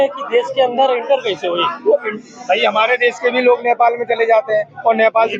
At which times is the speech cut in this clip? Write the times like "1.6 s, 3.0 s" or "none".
none